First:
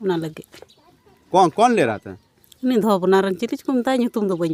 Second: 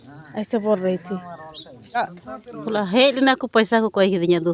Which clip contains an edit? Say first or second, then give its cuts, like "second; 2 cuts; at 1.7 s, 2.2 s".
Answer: second; 1 cut; at 2.0 s